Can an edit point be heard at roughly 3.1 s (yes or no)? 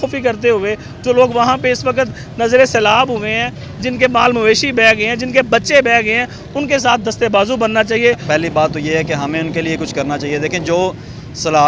no